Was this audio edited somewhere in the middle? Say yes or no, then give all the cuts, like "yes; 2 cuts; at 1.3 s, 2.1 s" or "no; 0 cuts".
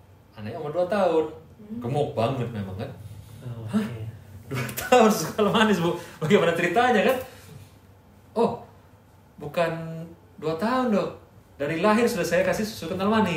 no; 0 cuts